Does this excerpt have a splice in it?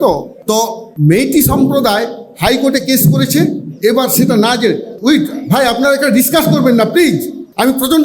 no; 0 cuts

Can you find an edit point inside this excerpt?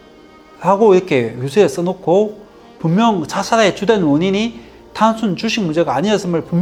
no; 0 cuts

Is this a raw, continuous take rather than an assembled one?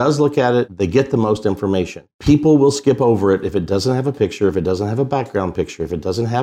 yes; 0 cuts

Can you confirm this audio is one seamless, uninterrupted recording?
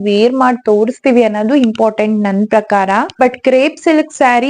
no; 1 cut; at 3.1 s

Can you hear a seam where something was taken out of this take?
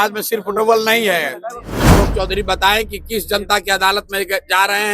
yes; 1 cut; at 1.9 s

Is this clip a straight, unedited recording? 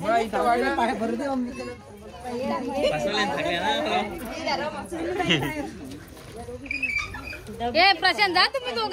yes; 0 cuts

